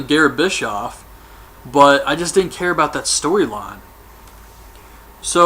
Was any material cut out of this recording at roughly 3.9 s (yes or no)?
yes